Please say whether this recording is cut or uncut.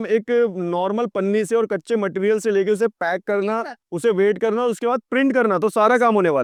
uncut